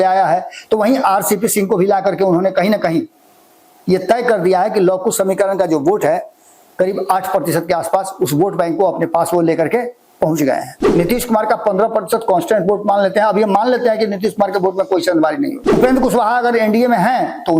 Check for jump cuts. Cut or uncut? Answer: cut